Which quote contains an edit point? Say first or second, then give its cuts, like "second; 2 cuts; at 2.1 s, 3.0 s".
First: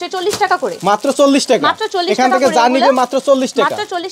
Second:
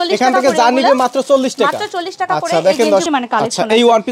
second; 1 cut; at 3.1 s